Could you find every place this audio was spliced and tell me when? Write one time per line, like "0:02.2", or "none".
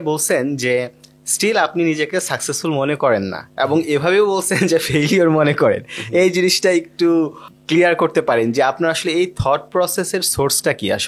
none

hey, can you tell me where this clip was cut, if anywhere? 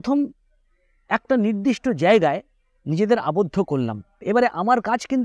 0:04.2

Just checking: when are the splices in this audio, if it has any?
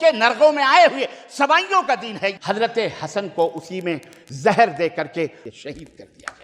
0:02.4
0:05.4

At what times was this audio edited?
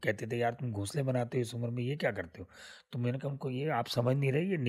none

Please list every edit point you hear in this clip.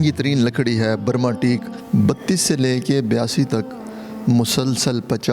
0:01.7

